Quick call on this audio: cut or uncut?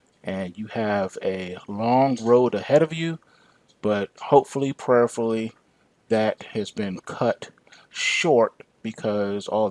cut